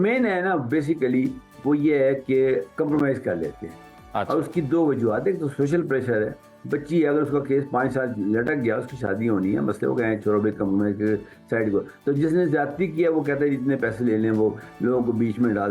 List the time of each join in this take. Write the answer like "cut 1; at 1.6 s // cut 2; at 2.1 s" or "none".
none

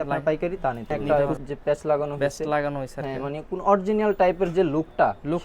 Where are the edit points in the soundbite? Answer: cut 1; at 1.0 s

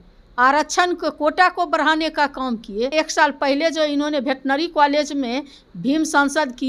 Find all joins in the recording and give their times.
cut 1; at 2.9 s

